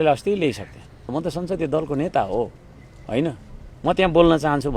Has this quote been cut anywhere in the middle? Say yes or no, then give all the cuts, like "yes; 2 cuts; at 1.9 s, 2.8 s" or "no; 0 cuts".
yes; 1 cut; at 1.1 s